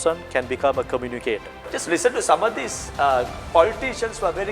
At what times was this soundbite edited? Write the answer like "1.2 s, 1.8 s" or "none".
1.6 s